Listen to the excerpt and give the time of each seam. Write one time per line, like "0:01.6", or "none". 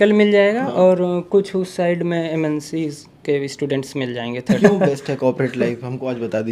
0:04.4